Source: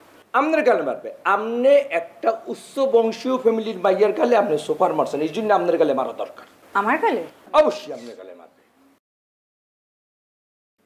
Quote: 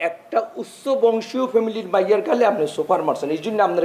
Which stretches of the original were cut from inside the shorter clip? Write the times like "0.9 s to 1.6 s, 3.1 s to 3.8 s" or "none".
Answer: none